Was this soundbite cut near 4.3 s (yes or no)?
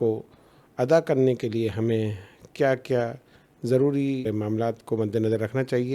yes